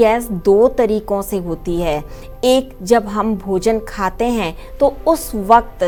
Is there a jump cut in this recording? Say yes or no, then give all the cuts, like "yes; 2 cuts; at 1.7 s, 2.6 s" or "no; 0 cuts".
no; 0 cuts